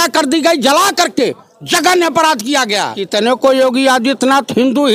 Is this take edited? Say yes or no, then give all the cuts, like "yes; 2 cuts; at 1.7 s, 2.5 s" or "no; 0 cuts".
yes; 1 cut; at 2.9 s